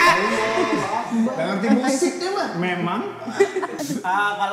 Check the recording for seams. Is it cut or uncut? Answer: uncut